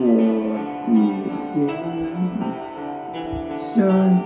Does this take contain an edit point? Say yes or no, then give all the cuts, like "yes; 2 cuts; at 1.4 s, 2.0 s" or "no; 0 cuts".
no; 0 cuts